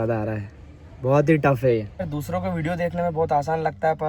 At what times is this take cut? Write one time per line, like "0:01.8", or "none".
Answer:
0:01.9